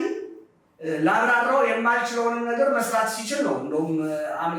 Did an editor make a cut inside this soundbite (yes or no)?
no